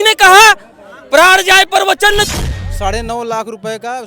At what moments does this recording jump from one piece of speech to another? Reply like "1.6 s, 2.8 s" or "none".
2.3 s